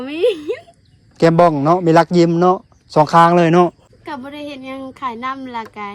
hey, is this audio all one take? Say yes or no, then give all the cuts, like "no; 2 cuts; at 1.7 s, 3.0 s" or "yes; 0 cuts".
no; 1 cut; at 3.9 s